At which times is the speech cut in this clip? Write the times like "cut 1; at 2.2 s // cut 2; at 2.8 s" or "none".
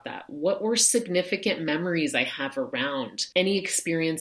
cut 1; at 3.2 s